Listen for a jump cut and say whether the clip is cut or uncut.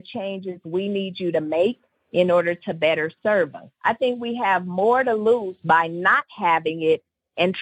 cut